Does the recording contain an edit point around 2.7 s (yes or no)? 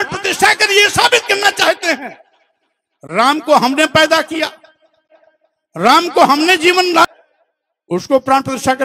no